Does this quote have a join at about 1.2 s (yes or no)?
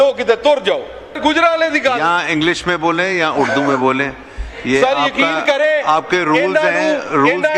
yes